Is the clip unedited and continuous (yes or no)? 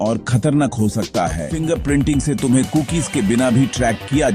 no